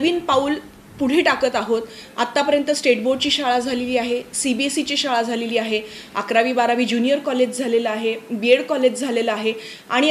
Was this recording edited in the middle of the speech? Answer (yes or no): no